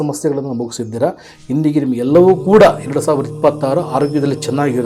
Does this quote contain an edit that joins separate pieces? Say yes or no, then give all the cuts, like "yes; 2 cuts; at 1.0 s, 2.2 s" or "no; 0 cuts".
no; 0 cuts